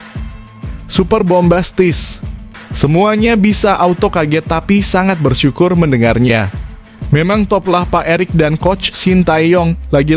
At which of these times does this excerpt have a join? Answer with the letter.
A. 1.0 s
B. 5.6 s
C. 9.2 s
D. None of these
A